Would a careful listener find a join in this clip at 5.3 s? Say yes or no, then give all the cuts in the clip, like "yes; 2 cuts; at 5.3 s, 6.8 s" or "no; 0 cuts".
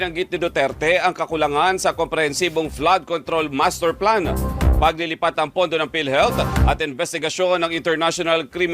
yes; 1 cut; at 5.3 s